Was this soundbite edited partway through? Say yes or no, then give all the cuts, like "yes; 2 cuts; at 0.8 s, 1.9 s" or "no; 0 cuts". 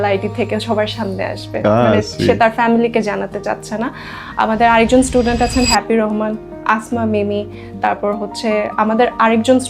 no; 0 cuts